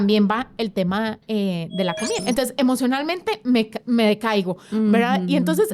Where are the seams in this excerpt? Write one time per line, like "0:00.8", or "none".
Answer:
0:02.2

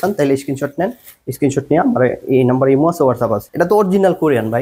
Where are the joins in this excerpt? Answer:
0:03.5

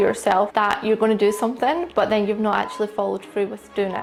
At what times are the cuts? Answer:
none

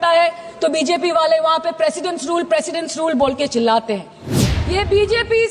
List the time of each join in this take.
0:04.3

